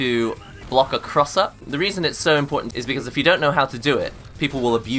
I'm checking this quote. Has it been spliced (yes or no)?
yes